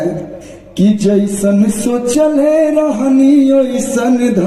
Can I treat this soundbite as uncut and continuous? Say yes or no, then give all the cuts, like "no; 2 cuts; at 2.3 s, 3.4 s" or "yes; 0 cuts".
yes; 0 cuts